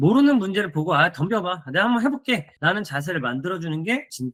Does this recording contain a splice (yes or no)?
no